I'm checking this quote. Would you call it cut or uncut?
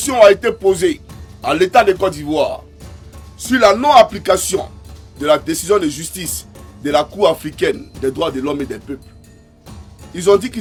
uncut